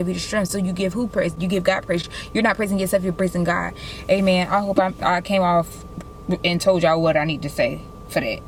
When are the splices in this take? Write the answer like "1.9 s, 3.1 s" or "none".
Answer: none